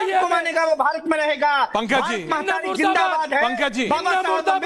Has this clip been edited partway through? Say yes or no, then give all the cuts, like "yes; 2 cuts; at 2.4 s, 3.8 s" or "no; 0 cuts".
no; 0 cuts